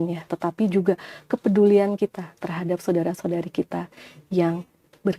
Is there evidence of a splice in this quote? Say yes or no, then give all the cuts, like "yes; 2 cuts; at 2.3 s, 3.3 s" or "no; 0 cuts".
no; 0 cuts